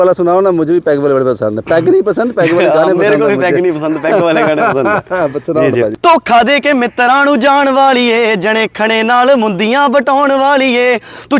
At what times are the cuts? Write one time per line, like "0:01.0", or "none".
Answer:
0:05.9